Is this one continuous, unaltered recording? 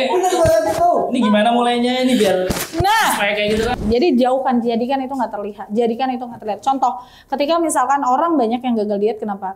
no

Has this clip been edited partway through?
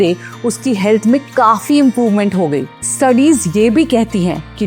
yes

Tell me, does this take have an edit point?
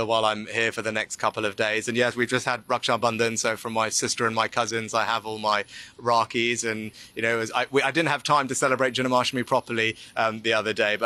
no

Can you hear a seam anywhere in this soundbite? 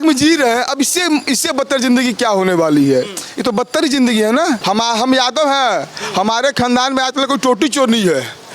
yes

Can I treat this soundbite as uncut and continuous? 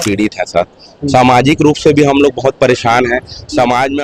yes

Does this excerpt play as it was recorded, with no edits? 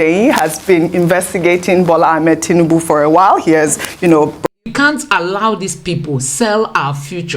no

